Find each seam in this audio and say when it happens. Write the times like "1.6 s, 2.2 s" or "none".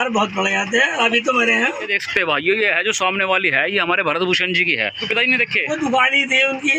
1.9 s, 5.0 s